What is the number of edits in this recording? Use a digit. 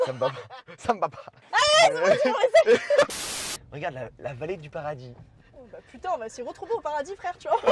2